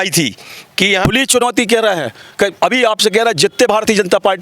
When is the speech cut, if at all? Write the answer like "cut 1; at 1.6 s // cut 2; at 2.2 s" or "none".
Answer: cut 1; at 1.1 s

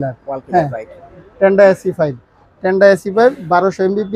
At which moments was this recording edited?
cut 1; at 1.1 s

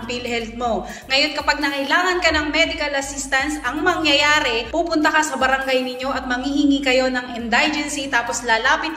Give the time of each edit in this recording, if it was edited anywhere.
none

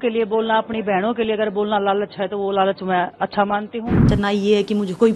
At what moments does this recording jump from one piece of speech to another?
cut 1; at 4.1 s

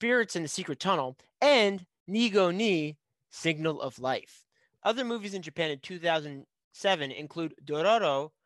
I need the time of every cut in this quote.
cut 1; at 4.7 s

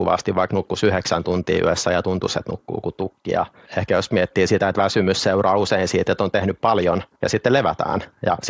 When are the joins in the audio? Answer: cut 1; at 3.6 s // cut 2; at 7.1 s

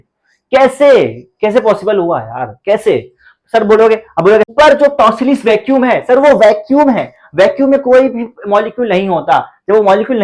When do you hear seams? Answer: cut 1; at 4.5 s

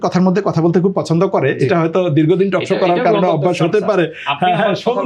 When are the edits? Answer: none

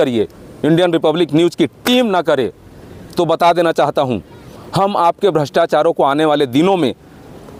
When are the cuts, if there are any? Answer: none

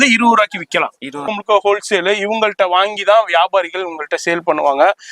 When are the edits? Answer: cut 1; at 1.1 s

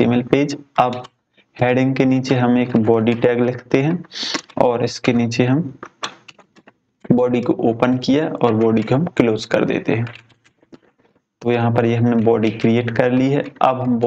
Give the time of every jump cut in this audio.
none

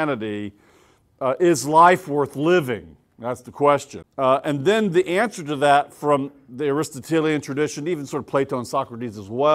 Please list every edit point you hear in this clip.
cut 1; at 4.0 s

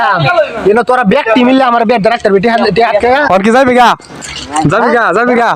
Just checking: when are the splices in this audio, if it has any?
none

